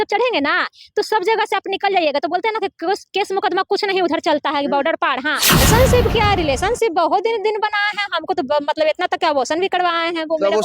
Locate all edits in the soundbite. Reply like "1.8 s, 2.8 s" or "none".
5.6 s

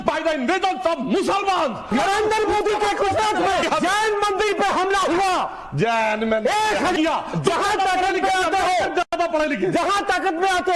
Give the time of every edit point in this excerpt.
2.3 s, 3.6 s, 7.0 s

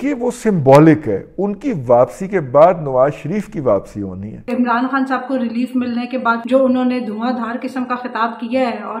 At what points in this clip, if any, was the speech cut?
4.5 s, 6.4 s

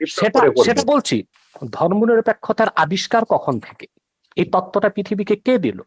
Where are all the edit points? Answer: 1.3 s

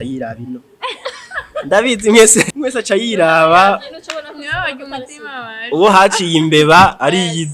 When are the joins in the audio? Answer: 2.5 s

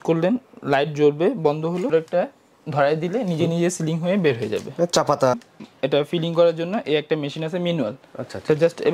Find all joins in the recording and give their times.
1.9 s, 5.4 s

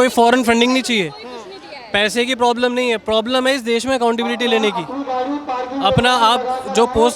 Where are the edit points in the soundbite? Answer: none

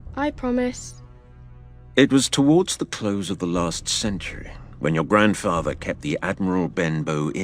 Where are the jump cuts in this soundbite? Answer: 1.3 s

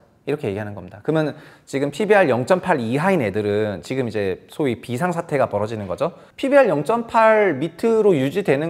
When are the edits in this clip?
6.2 s

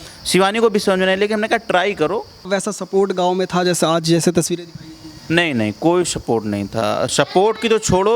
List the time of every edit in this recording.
2.5 s

